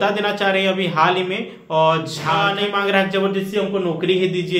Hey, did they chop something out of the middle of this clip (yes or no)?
yes